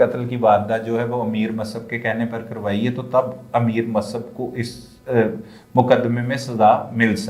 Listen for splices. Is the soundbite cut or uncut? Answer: uncut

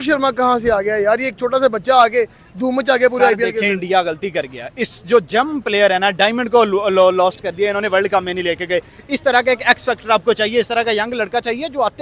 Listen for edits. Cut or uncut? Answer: uncut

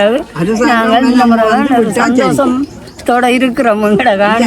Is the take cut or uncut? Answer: uncut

